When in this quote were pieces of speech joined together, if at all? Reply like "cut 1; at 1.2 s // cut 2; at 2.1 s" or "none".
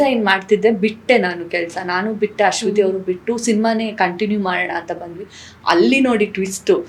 none